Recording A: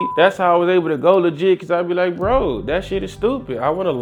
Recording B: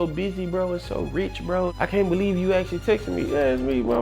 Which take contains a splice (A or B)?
B